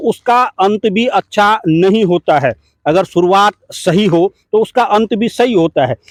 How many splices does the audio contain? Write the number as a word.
zero